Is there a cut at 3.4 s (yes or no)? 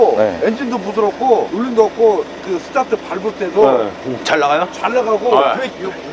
no